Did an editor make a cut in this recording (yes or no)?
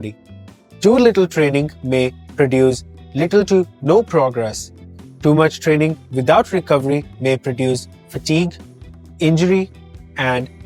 no